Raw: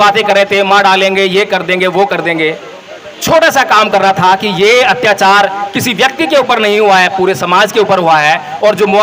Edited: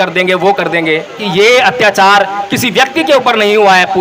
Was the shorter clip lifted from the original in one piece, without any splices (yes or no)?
no